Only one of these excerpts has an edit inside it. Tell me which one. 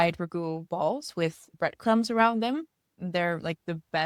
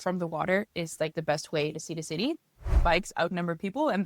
second; 1 cut; at 2.7 s

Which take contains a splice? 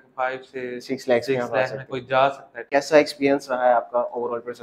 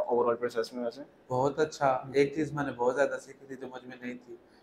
first; 1 cut; at 2.5 s

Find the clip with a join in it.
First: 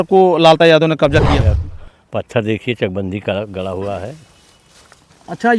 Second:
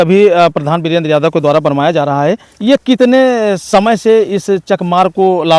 first; 1 cut; at 1.4 s

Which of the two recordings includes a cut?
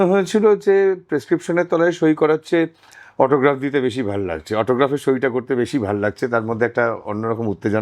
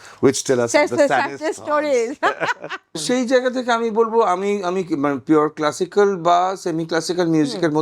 second; 1 cut; at 3.0 s

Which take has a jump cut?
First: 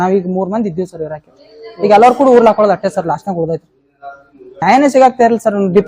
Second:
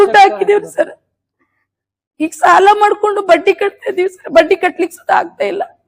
first; 1 cut; at 4.6 s

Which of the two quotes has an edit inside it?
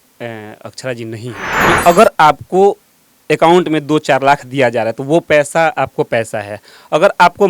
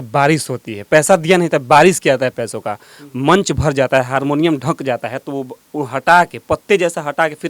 first; 1 cut; at 1.5 s

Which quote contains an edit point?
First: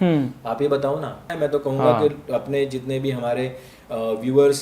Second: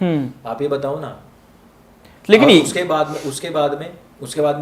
first; 1 cut; at 1.3 s

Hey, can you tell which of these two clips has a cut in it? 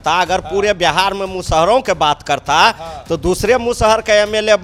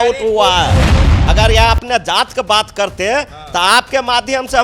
second; 1 cut; at 1.1 s

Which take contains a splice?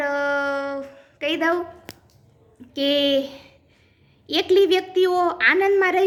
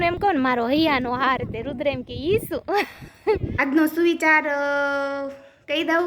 second; 1 cut; at 3.5 s

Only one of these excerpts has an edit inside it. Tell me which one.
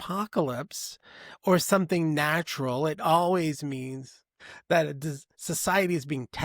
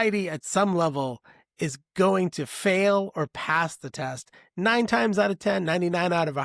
first; 1 cut; at 4.3 s

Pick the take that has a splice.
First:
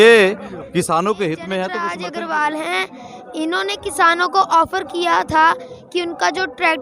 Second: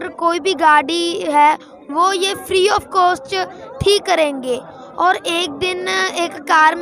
first; 1 cut; at 1.8 s

